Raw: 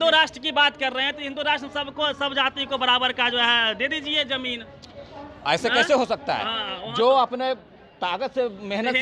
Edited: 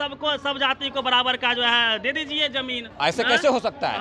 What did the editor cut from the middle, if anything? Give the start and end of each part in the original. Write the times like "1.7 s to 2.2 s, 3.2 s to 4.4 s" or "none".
4.6 s to 5.3 s